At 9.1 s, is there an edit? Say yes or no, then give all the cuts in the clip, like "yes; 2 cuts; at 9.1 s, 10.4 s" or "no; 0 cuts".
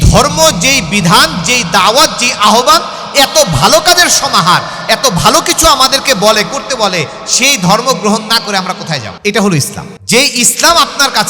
no; 0 cuts